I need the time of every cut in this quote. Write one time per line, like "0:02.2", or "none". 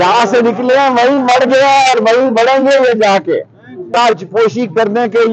0:03.8